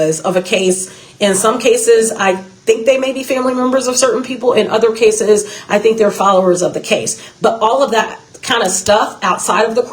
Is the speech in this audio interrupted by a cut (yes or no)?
no